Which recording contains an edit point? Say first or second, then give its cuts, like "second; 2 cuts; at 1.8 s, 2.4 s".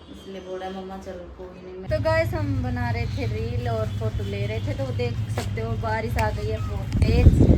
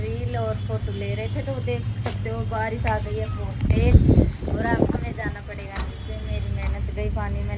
first; 1 cut; at 1.9 s